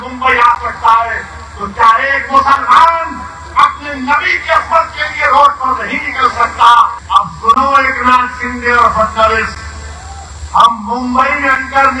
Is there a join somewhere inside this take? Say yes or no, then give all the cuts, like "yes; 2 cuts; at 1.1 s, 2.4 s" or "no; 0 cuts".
yes; 1 cut; at 7.0 s